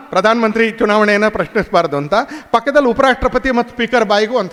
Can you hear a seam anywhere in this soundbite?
no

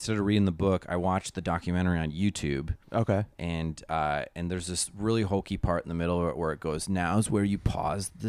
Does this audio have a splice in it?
no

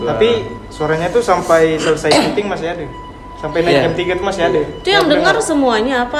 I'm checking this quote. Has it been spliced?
no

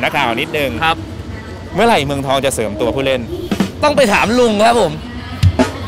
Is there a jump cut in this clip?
no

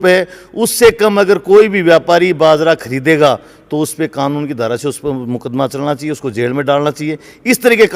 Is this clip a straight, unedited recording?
yes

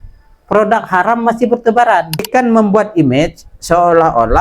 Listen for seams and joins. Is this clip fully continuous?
no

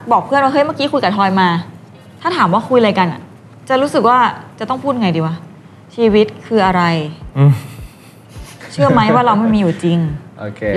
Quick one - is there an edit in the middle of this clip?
no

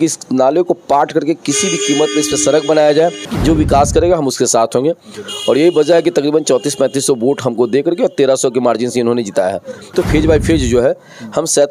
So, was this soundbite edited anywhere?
yes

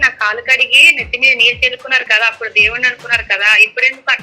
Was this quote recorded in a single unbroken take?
yes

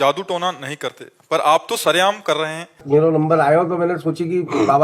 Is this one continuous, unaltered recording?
no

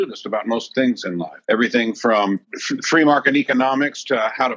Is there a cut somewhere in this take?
yes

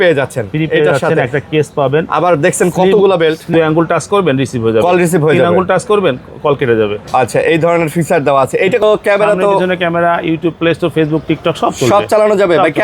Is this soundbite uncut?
no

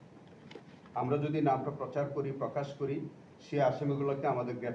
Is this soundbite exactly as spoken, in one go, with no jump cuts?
yes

